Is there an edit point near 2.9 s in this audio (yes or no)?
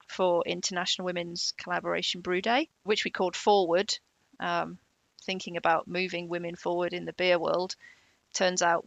yes